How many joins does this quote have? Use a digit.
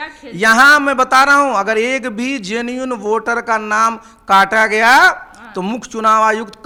0